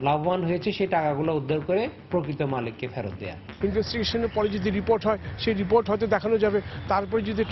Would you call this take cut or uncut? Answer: cut